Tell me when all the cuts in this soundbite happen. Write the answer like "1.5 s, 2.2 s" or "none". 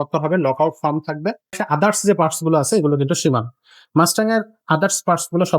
1.6 s